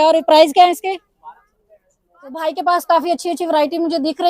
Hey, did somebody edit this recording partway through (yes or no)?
yes